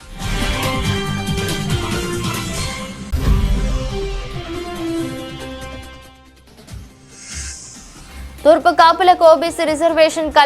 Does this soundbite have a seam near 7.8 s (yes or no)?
no